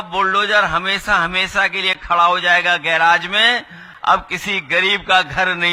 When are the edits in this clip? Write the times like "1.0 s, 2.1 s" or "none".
none